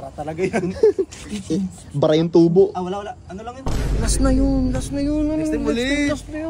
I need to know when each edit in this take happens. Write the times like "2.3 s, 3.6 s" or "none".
3.9 s